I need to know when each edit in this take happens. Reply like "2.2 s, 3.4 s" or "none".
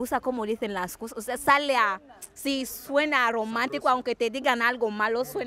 none